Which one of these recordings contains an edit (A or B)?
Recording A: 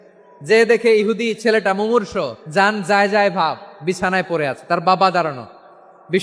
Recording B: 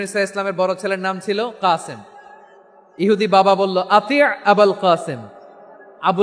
A